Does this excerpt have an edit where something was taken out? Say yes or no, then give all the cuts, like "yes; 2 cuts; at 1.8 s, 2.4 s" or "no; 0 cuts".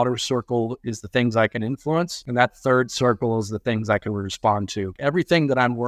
yes; 2 cuts; at 2.2 s, 4.9 s